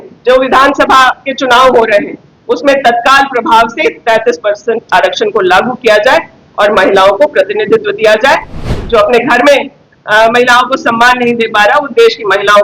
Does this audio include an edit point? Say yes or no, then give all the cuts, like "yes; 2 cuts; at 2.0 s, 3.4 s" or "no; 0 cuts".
yes; 1 cut; at 8.6 s